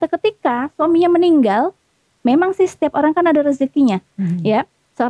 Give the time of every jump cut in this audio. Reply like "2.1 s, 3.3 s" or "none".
none